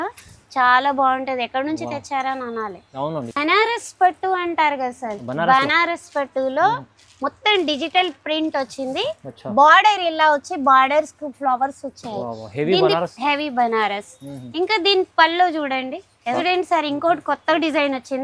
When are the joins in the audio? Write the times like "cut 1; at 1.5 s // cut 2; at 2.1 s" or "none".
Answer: cut 1; at 3.1 s // cut 2; at 16.4 s